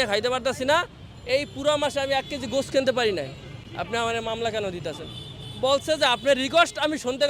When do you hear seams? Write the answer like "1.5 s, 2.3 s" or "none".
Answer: none